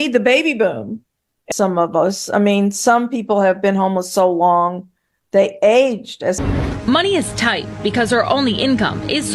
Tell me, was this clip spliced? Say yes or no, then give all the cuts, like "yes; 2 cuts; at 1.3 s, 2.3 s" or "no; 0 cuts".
yes; 2 cuts; at 1.4 s, 6.4 s